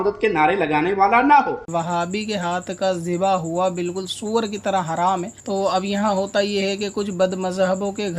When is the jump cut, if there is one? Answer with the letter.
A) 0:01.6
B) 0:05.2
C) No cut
A